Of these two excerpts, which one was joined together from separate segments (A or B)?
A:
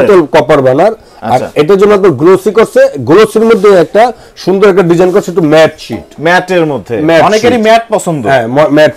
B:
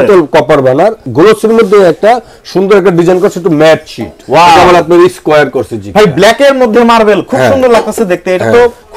B